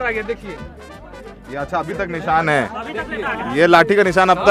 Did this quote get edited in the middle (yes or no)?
no